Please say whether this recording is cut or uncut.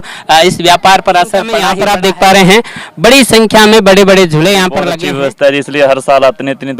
cut